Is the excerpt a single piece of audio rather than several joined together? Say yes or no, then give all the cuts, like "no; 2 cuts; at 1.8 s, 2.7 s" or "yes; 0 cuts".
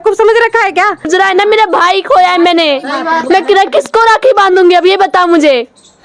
no; 1 cut; at 1.1 s